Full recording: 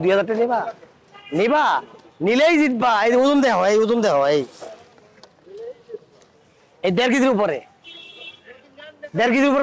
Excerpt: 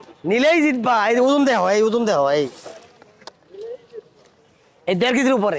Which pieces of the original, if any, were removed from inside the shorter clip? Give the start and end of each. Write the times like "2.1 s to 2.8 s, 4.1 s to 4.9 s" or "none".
none